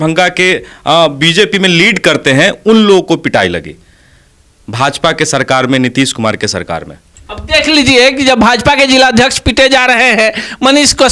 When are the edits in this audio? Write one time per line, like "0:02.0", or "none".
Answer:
none